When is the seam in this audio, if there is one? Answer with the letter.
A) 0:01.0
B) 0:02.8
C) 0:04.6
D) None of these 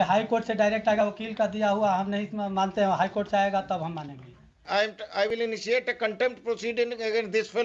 C